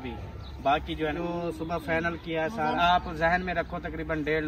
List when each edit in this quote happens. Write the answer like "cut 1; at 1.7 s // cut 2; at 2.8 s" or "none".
cut 1; at 1.2 s // cut 2; at 2.8 s